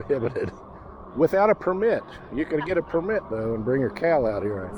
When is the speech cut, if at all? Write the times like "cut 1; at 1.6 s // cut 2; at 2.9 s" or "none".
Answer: none

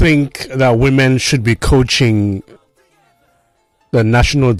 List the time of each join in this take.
none

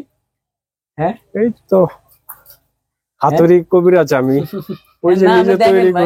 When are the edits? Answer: none

